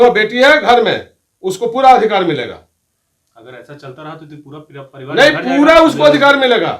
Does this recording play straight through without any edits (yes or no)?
yes